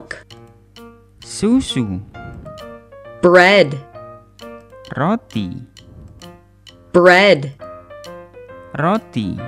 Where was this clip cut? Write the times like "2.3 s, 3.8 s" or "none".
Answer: none